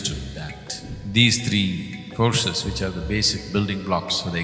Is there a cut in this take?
yes; 1 cut; at 0.9 s

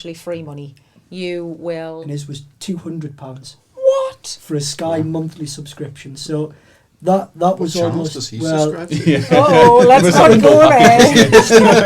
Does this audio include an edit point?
yes; 1 cut; at 2.0 s

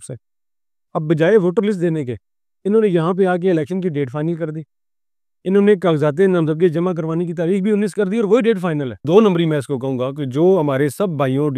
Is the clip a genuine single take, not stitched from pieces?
no; 1 cut; at 9.0 s

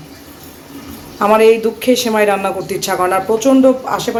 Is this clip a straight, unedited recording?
yes; 0 cuts

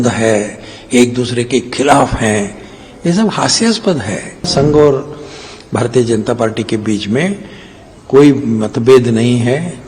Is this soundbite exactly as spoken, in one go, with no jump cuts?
no; 1 cut; at 4.5 s

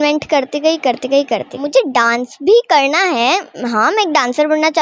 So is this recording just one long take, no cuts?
no; 1 cut; at 1.6 s

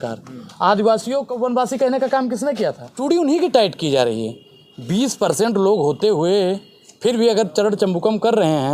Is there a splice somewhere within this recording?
yes; 2 cuts; at 1.3 s, 2.9 s

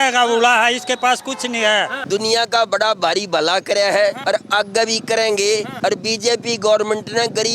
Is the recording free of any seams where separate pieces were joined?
no; 3 cuts; at 2.0 s, 4.2 s, 5.7 s

